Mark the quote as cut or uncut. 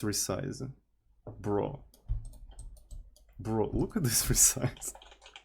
uncut